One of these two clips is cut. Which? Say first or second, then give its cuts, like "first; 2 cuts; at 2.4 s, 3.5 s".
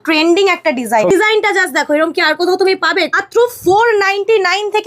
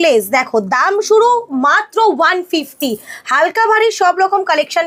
first; 2 cuts; at 1.1 s, 3.1 s